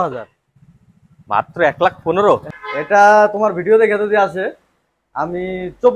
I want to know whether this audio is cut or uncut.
cut